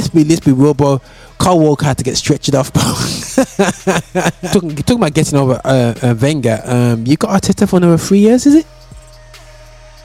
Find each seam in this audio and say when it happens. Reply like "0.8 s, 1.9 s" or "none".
4.4 s